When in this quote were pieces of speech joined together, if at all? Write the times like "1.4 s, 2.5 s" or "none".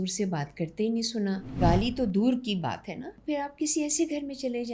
1.5 s, 3.1 s